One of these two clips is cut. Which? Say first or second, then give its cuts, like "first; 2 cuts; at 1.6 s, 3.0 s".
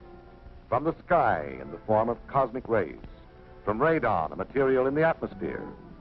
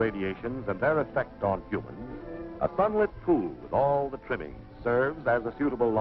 second; 1 cut; at 1.9 s